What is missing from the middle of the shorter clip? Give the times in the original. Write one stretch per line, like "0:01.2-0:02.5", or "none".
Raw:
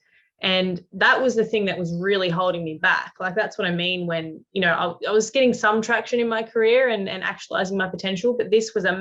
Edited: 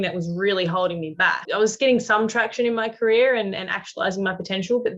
0:03.1-0:05.0